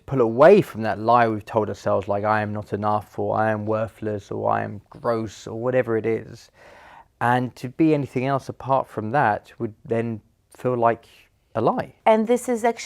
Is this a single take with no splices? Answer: no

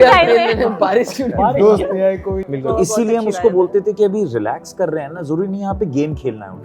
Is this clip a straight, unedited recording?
no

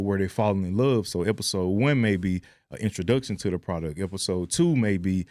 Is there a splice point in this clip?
no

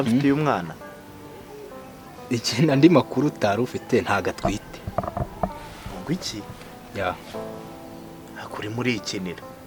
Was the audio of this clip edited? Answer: no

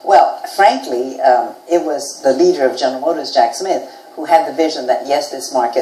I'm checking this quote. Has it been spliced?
yes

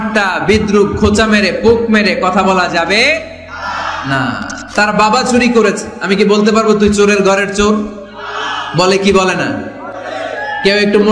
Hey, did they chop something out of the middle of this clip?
yes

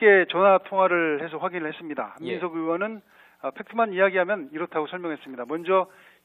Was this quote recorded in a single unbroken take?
yes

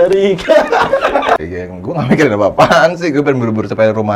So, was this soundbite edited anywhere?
yes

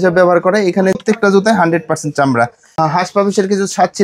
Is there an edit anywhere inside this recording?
yes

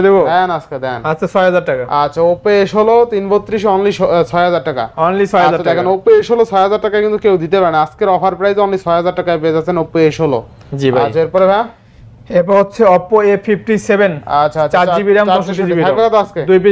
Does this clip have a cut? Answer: no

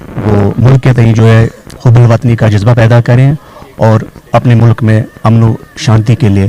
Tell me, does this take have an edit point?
no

